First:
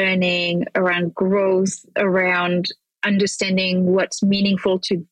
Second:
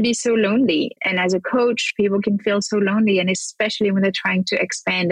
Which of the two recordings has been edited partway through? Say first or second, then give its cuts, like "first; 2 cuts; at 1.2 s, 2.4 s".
second; 1 cut; at 1.0 s